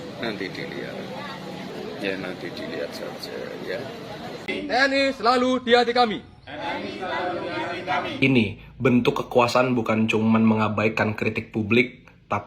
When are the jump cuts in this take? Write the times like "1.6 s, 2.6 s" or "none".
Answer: 1.7 s, 4.5 s